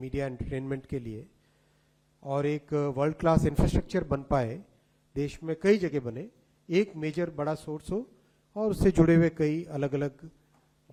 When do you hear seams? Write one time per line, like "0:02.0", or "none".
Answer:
none